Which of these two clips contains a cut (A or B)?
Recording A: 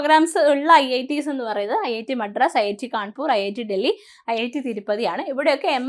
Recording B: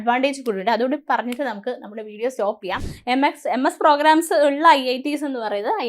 B